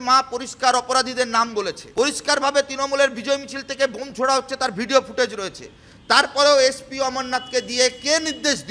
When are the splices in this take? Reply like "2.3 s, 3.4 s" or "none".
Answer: 1.8 s